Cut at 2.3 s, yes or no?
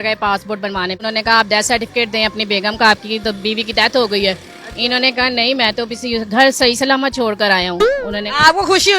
no